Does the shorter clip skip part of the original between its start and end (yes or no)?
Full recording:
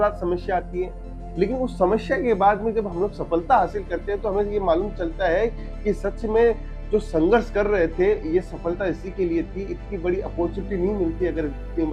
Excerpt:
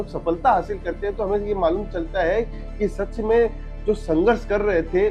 no